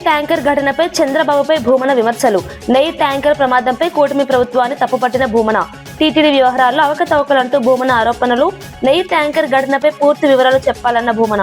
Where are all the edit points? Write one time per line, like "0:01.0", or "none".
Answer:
none